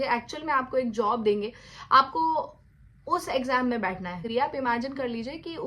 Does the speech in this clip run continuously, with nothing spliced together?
no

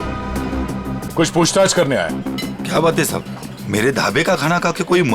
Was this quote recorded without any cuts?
no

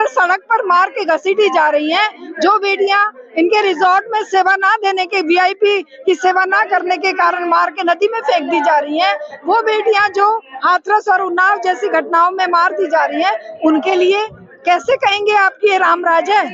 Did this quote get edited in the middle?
no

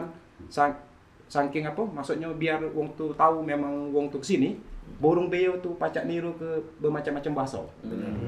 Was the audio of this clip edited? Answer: no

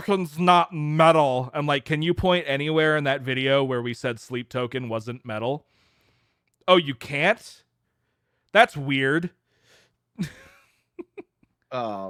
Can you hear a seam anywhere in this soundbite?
no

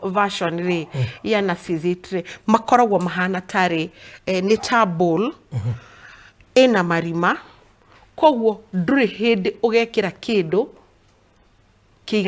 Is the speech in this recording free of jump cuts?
yes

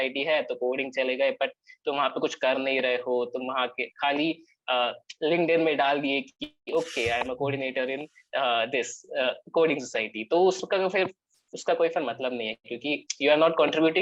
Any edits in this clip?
no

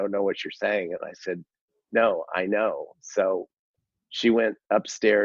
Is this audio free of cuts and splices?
yes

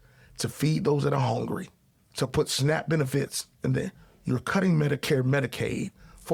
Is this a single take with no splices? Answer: yes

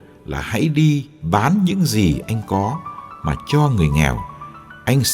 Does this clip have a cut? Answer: yes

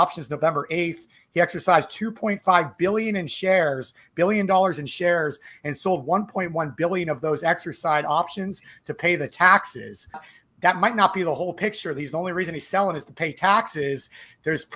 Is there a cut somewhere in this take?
yes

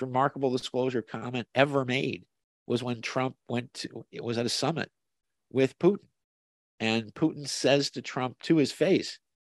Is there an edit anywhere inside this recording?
no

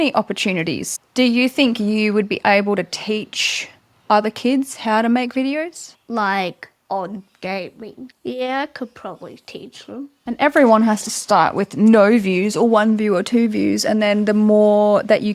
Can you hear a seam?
yes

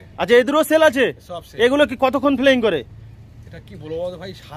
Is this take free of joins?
yes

